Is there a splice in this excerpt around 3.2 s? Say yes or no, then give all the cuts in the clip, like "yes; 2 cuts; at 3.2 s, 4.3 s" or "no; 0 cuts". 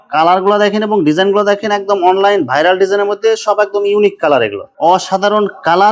no; 1 cut; at 4.7 s